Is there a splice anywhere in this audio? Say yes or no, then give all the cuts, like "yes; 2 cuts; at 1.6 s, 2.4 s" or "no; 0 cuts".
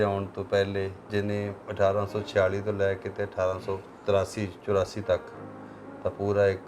yes; 2 cuts; at 1.0 s, 3.9 s